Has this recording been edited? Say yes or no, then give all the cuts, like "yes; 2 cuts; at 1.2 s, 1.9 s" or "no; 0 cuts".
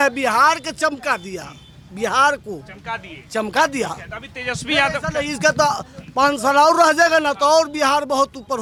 no; 0 cuts